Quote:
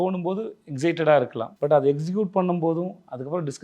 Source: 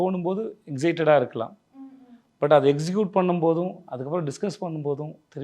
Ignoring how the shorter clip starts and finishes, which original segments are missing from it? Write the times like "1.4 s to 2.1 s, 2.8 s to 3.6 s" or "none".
1.4 s to 2.2 s